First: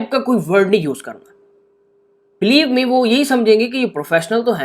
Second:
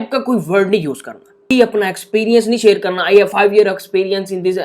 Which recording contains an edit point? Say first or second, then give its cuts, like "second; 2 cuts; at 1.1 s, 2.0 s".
second; 1 cut; at 1.5 s